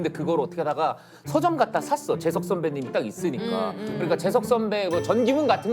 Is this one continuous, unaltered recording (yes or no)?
yes